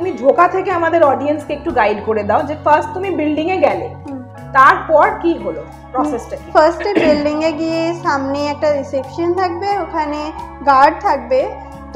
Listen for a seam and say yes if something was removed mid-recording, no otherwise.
no